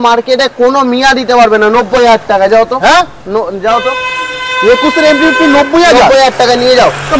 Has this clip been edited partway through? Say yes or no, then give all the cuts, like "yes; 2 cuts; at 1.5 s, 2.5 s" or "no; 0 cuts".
no; 0 cuts